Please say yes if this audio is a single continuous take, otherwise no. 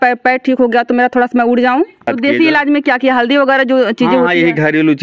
no